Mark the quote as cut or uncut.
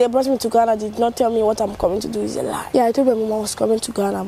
cut